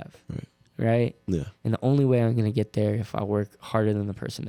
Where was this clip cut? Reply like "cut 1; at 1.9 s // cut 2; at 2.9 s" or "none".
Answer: none